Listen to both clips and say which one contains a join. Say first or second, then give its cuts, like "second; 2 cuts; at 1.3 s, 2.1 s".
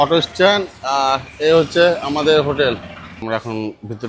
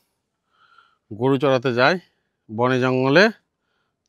first; 1 cut; at 3.2 s